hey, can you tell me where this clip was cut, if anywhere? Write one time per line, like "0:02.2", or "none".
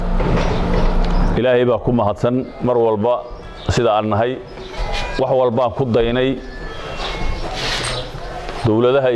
0:04.7